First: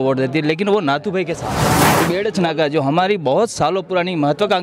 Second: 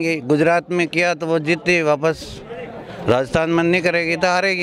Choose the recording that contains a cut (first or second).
first